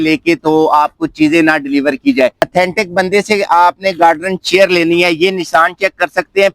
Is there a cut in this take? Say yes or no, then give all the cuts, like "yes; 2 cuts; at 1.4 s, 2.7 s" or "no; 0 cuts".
yes; 1 cut; at 2.5 s